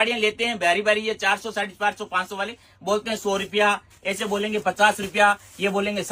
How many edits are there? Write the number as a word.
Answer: zero